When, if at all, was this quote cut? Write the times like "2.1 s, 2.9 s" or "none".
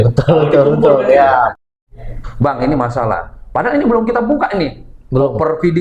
1.6 s